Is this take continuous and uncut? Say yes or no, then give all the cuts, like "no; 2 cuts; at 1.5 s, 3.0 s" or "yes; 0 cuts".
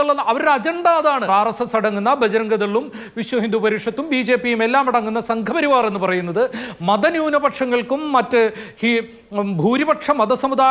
no; 1 cut; at 1.3 s